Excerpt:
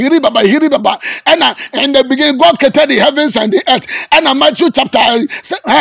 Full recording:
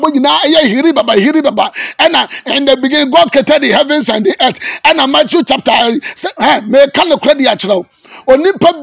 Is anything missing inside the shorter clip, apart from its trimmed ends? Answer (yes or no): no